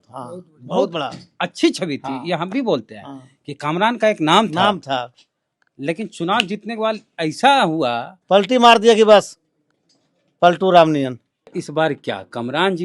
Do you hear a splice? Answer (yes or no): yes